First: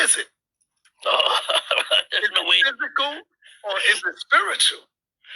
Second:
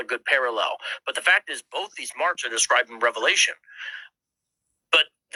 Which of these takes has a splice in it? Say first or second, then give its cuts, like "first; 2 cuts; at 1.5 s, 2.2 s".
first; 1 cut; at 3.3 s